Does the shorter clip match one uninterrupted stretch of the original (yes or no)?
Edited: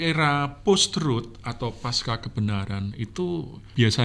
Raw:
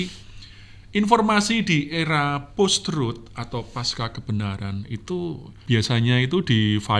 yes